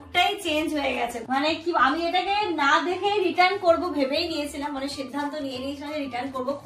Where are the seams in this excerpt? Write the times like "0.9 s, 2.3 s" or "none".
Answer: 1.2 s